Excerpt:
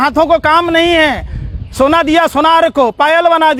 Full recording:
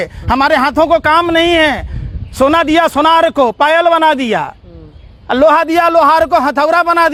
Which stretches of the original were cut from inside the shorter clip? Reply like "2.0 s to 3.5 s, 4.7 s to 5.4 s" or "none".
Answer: none